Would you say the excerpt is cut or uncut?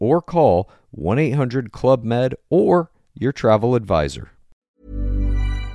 cut